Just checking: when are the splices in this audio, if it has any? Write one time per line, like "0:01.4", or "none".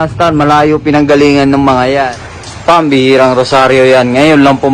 0:02.1